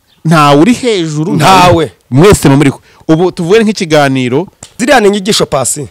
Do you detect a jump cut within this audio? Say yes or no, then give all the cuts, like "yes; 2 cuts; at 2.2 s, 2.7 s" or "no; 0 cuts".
yes; 1 cut; at 4.6 s